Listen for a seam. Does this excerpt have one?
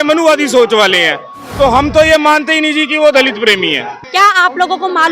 yes; 1 cut; at 3.9 s

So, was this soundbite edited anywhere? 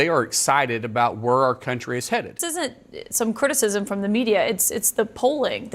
yes; 1 cut; at 2.5 s

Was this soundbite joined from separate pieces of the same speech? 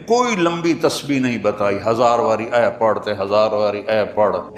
no; 0 cuts

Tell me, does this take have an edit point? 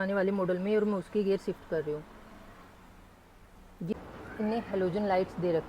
yes; 1 cut; at 3.9 s

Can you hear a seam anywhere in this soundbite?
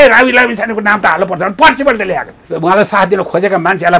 yes; 1 cut; at 2.4 s

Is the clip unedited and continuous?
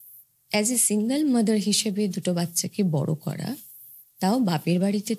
yes; 0 cuts

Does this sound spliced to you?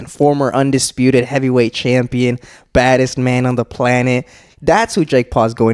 no; 0 cuts

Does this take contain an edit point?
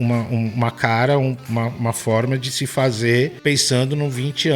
yes; 1 cut; at 3.3 s

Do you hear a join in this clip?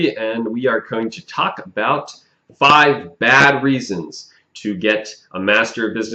no; 0 cuts

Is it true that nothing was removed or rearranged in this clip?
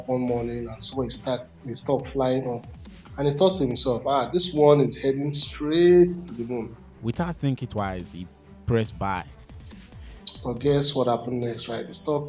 no; 2 cuts; at 6.8 s, 9.7 s

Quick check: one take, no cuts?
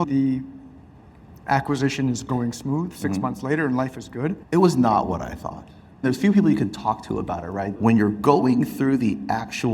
no; 3 cuts; at 4.4 s, 6.0 s, 7.7 s

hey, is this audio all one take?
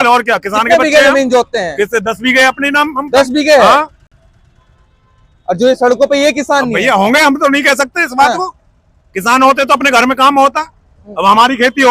yes; 0 cuts

